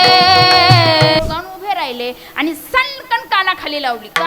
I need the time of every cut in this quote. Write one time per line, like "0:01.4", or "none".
0:01.2